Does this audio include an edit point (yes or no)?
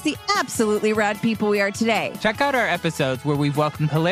yes